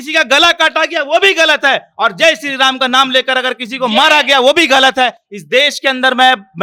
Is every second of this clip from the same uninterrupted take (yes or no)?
yes